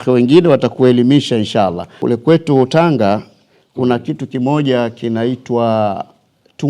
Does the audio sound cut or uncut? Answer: cut